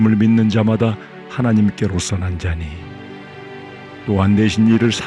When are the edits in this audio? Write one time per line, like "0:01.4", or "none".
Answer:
none